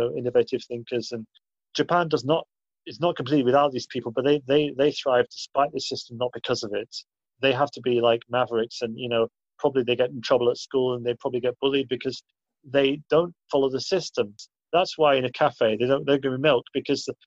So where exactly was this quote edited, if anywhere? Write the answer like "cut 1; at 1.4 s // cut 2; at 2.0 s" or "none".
cut 1; at 14.4 s